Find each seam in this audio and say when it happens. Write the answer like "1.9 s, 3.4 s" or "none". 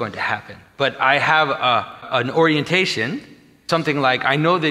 2.1 s, 3.7 s